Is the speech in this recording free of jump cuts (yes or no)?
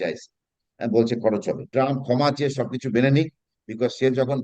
no